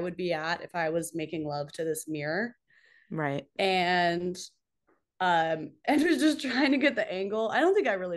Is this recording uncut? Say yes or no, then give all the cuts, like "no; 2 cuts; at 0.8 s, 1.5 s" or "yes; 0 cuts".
yes; 0 cuts